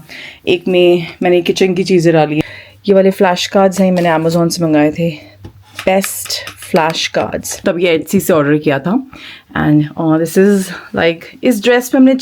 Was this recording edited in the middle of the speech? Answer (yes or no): yes